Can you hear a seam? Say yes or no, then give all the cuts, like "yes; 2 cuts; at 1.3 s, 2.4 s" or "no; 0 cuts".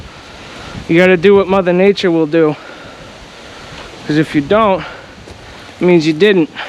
no; 0 cuts